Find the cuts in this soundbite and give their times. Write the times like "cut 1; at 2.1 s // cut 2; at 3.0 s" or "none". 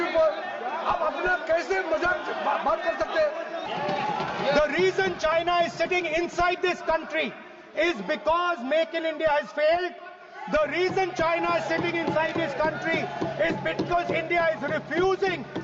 cut 1; at 3.6 s